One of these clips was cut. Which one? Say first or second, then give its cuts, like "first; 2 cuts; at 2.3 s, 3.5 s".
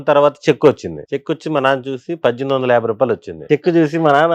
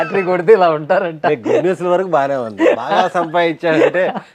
first; 2 cuts; at 0.9 s, 3.4 s